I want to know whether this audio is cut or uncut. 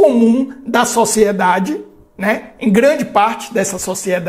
uncut